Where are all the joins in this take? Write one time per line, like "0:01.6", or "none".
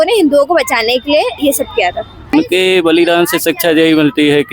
0:02.3